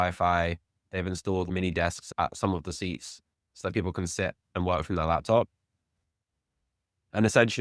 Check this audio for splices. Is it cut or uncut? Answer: cut